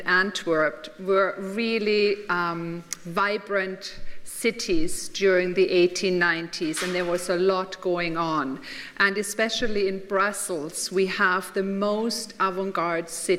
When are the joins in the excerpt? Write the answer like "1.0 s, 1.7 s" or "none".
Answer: 5.5 s